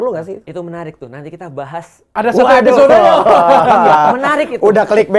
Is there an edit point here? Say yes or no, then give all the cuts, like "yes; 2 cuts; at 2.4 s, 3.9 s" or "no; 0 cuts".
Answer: no; 0 cuts